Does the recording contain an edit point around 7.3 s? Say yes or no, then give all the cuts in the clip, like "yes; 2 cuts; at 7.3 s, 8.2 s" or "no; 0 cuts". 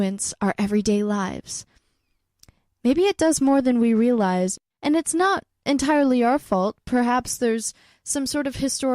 no; 1 cut; at 4.2 s